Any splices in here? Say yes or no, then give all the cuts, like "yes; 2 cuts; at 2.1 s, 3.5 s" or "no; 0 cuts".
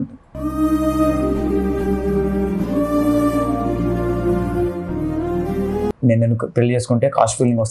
yes; 1 cut; at 6.0 s